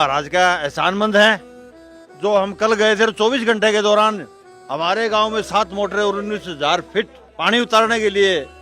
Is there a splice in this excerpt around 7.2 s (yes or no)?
yes